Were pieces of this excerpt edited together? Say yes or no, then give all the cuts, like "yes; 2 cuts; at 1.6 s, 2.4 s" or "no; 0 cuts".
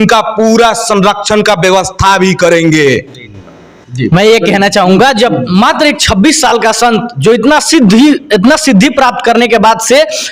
no; 0 cuts